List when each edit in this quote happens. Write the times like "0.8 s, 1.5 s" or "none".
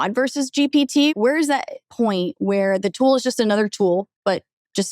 1.1 s